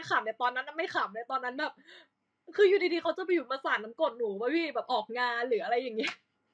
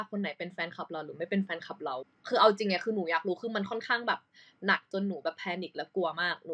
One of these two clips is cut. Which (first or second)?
second